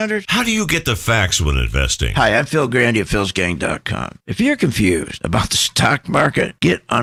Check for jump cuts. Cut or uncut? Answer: uncut